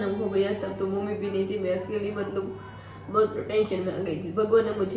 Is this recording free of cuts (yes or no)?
yes